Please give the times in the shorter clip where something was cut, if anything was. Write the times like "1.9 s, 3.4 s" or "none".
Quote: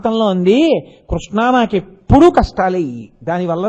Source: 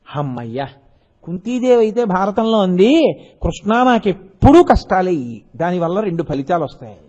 none